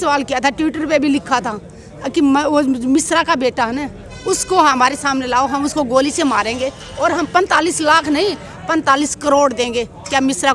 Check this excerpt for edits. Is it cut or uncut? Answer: uncut